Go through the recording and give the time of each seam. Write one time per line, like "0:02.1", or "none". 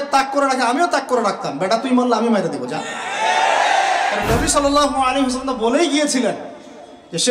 0:04.2

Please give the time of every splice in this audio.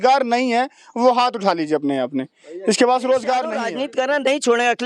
0:03.7

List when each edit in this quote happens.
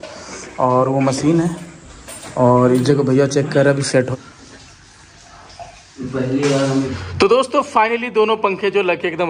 0:04.1
0:06.9

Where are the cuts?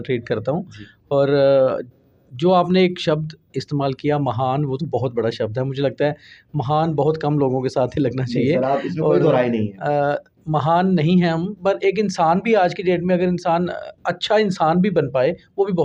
none

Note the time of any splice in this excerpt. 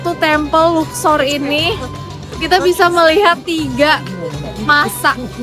none

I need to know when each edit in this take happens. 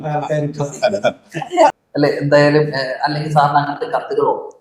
0:01.8

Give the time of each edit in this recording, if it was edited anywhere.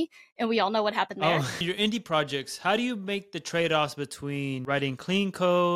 0:01.6
0:04.6

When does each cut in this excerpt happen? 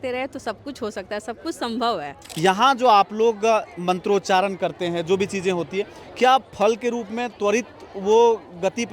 0:02.2

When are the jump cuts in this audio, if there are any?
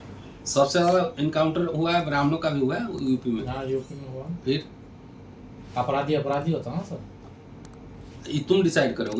none

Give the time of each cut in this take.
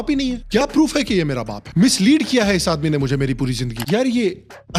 0:03.8

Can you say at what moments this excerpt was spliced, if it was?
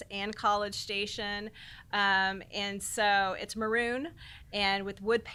none

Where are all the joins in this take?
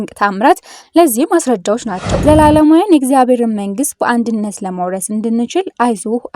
0:02.1

